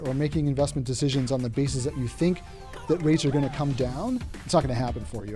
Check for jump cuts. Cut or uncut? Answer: cut